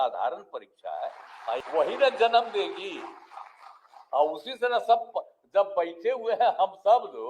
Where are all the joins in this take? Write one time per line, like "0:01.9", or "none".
0:01.6